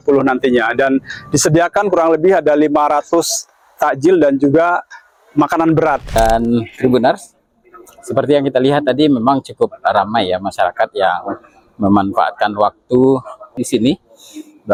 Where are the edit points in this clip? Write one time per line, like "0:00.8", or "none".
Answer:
none